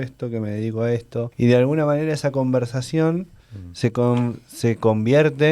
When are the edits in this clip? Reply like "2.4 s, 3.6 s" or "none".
1.3 s